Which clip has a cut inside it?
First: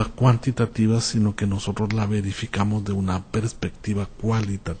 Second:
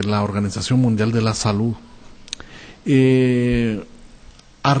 second; 1 cut; at 3.2 s

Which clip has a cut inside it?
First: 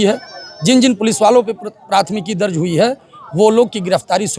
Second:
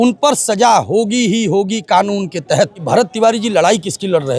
second; 1 cut; at 2.8 s

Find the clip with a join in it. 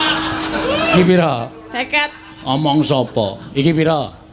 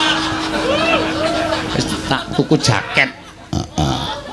first; 1 cut; at 0.9 s

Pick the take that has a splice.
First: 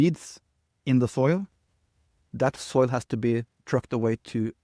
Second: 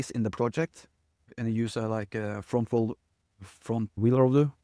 second; 1 cut; at 1.2 s

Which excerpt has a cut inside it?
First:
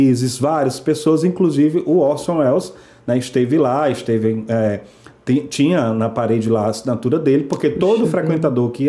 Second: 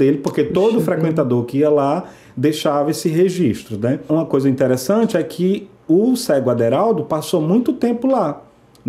second; 1 cut; at 4.1 s

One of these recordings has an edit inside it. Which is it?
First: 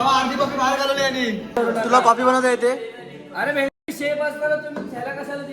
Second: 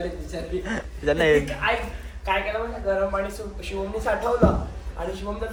first; 1 cut; at 1.6 s

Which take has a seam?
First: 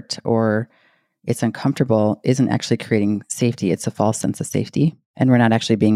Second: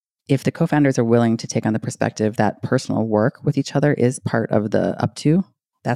first; 1 cut; at 5.0 s

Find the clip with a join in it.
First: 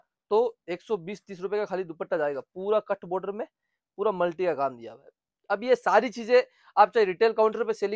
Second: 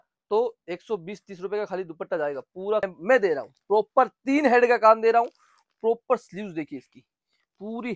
second; 1 cut; at 2.8 s

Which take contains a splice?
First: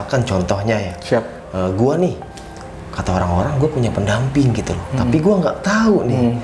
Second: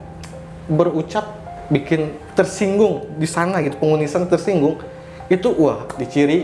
second; 1 cut; at 1.5 s

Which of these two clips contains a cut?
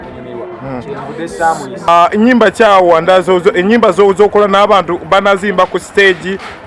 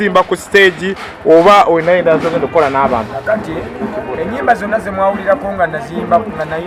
first; 1 cut; at 1.9 s

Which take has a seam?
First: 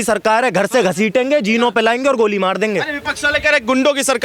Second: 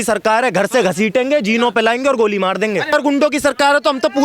second; 1 cut; at 2.9 s

